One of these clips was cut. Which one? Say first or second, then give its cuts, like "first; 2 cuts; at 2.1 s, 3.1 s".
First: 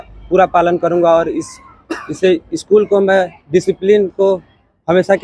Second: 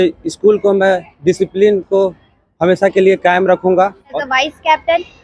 second; 1 cut; at 4.2 s